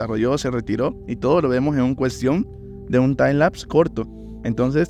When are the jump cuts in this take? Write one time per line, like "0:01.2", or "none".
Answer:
none